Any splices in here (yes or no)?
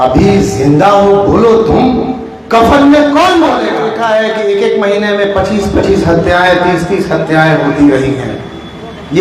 yes